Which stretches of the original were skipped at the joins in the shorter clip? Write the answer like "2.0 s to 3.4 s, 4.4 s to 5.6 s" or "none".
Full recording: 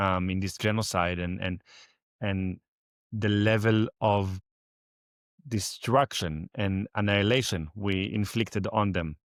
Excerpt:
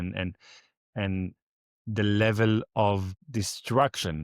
4.4 s to 5.3 s